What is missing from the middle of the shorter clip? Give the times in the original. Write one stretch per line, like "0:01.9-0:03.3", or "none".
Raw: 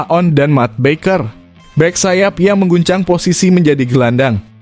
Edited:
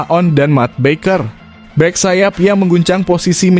none